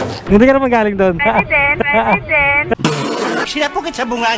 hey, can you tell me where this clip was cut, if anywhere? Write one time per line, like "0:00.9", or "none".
0:01.2